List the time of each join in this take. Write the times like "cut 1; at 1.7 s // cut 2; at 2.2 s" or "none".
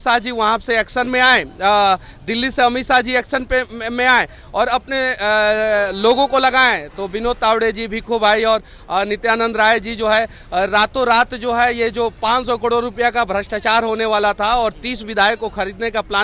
none